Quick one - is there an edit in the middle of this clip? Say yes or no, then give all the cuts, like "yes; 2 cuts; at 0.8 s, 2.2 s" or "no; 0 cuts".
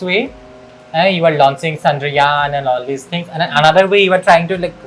no; 0 cuts